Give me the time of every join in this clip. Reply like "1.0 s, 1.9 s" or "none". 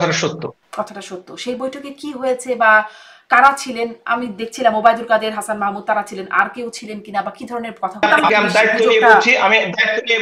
8.0 s